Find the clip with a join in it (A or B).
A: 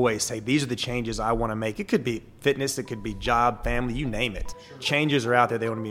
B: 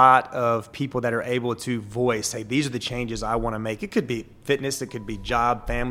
A